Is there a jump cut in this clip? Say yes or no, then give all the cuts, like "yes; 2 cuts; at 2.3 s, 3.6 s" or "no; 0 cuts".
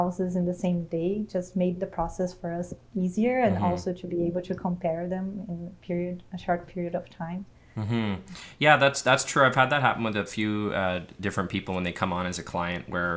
no; 0 cuts